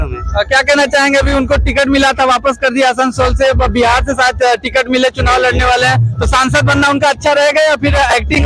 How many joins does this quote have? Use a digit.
0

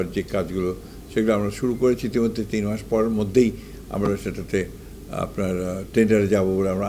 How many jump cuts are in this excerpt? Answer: 0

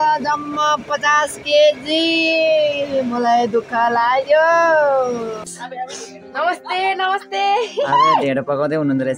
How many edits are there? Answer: 1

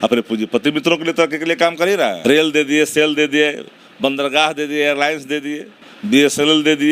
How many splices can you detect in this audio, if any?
1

